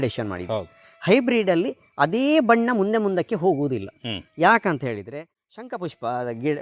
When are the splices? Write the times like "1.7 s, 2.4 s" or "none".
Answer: 5.1 s